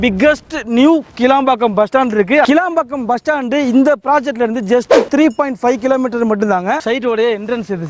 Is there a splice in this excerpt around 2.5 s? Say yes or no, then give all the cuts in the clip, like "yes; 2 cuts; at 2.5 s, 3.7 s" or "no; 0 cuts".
yes; 2 cuts; at 2.5 s, 6.8 s